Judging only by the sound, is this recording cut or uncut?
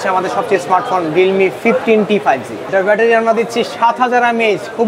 cut